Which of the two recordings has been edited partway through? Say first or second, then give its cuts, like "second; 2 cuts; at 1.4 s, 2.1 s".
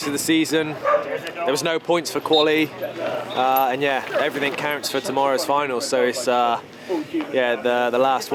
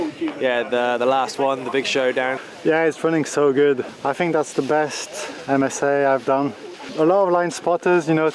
second; 3 cuts; at 2.4 s, 3.9 s, 6.8 s